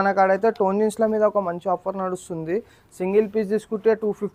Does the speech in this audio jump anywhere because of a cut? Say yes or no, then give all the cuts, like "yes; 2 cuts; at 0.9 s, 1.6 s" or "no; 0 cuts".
no; 0 cuts